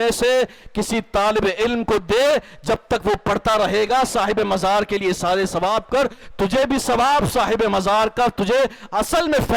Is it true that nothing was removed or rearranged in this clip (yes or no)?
yes